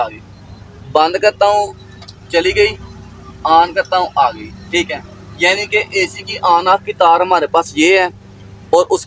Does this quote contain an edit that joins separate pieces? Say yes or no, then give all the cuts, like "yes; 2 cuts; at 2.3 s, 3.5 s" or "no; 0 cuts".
no; 0 cuts